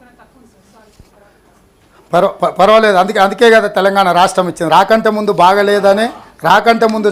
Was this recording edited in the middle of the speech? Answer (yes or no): no